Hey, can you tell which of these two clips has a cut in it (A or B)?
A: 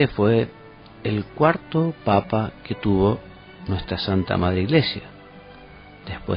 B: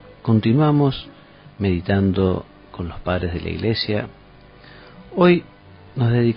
A